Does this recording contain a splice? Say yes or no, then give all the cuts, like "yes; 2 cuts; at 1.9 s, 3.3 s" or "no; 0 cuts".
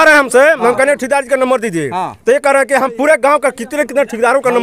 no; 0 cuts